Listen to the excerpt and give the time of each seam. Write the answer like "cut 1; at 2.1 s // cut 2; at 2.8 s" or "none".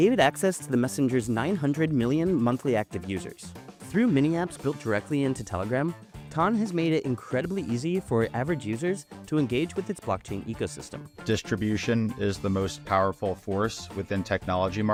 none